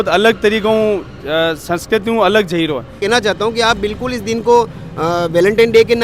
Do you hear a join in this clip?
yes; 1 cut; at 3.0 s

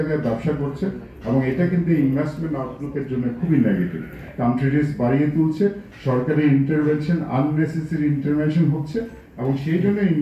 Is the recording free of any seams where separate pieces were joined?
yes; 0 cuts

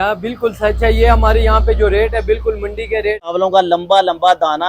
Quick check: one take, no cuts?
no; 1 cut; at 3.3 s

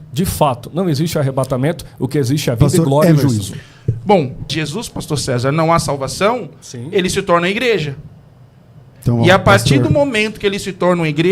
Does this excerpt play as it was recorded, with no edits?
no; 1 cut; at 4.5 s

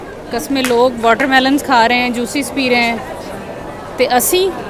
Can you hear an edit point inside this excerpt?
no; 0 cuts

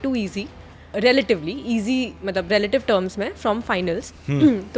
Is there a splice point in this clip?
yes; 1 cut; at 0.9 s

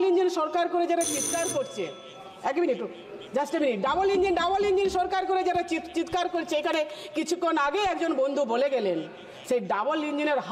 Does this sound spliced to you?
no; 0 cuts

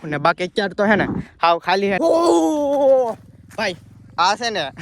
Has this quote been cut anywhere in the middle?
yes; 1 cut; at 2.0 s

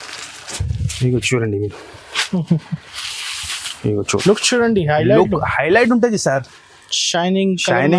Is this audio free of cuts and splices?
yes; 0 cuts

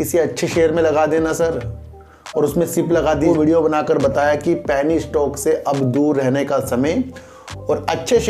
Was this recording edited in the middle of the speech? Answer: yes; 1 cut; at 3.3 s

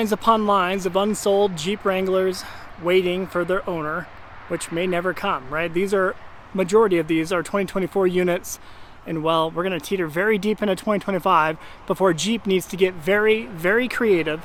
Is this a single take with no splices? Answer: yes; 0 cuts

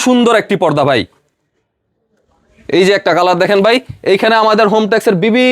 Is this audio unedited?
yes; 0 cuts

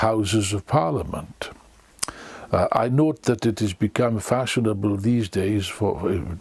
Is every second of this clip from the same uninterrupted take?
yes; 0 cuts

